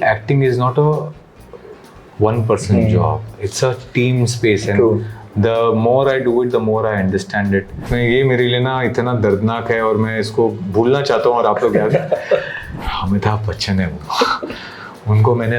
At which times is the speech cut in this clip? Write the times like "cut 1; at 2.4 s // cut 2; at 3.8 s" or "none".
cut 1; at 7.8 s // cut 2; at 12.7 s